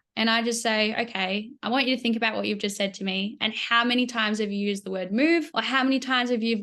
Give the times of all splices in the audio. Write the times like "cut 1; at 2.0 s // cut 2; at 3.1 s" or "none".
cut 1; at 5.6 s